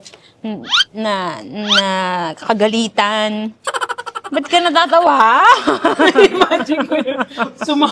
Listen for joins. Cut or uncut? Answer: uncut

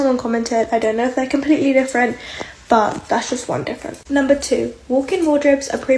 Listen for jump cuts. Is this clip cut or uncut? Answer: uncut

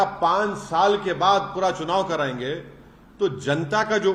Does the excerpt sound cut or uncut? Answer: uncut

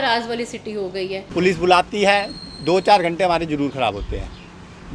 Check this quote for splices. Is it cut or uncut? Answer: cut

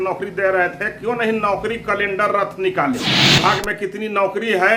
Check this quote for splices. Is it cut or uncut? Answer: cut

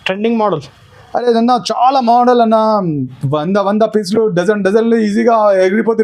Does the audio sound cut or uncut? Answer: uncut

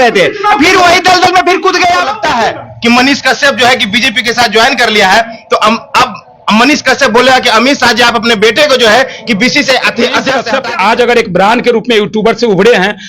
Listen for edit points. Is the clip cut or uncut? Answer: cut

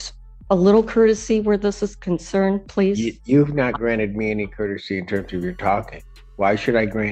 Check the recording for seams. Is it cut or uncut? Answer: uncut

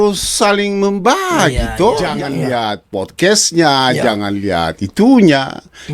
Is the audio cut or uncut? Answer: cut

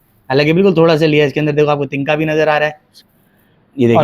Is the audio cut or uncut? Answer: cut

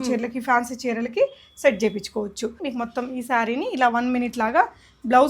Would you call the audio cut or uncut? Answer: cut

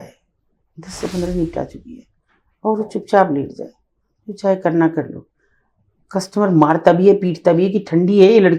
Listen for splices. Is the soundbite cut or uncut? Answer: uncut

